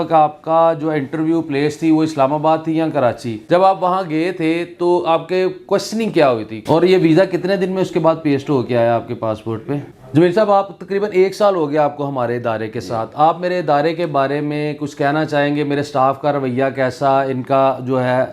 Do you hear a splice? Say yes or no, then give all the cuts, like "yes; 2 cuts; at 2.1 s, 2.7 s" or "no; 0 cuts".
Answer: yes; 3 cuts; at 3.3 s, 6.5 s, 9.9 s